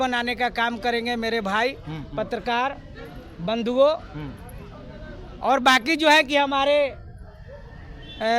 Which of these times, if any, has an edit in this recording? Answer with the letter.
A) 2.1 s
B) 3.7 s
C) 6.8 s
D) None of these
D